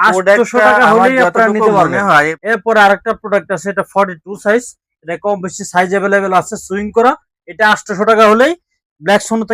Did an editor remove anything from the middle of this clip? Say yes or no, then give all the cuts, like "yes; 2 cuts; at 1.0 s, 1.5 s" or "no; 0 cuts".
yes; 1 cut; at 2.4 s